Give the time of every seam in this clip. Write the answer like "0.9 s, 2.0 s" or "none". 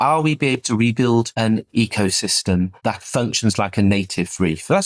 1.3 s, 2.7 s